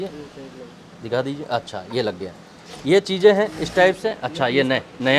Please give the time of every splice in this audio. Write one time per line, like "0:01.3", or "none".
none

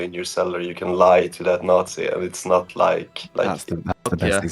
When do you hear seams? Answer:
0:03.2

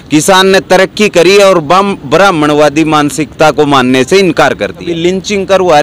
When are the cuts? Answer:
0:04.9

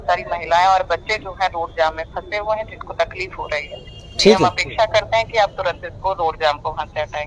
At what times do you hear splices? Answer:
none

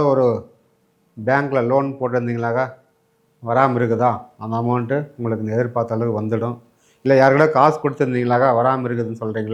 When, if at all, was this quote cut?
none

